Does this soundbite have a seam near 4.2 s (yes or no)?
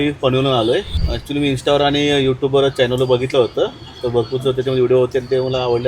no